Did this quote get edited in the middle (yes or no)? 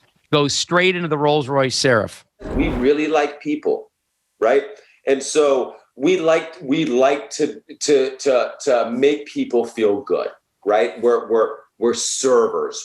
yes